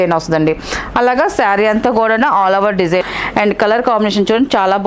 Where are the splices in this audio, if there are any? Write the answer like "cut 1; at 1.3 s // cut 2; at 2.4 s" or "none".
cut 1; at 3.0 s